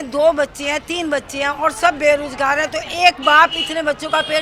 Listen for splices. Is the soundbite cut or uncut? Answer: uncut